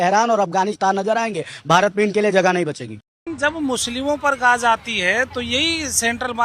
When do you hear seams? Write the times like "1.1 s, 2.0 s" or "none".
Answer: 2.9 s